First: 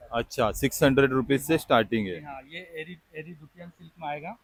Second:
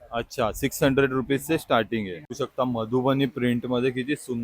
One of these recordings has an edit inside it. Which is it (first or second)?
second